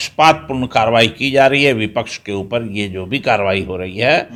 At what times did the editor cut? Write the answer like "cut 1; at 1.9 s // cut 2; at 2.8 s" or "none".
none